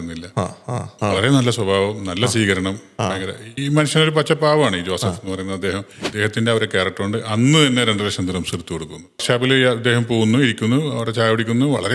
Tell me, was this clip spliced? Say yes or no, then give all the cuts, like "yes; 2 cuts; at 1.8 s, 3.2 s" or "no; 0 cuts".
yes; 3 cuts; at 0.9 s, 6.0 s, 9.2 s